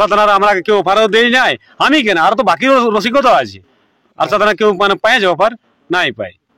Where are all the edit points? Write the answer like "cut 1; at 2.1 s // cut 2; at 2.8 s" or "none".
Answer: none